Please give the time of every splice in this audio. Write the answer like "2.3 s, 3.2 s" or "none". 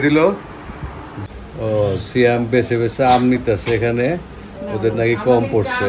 1.2 s